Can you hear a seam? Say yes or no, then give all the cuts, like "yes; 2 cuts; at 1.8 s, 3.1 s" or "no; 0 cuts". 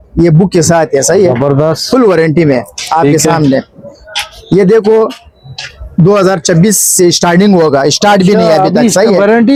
no; 0 cuts